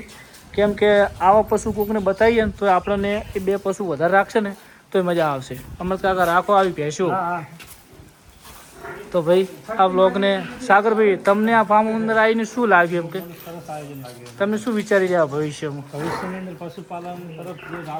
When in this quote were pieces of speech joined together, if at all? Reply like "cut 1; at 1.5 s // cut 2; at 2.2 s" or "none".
none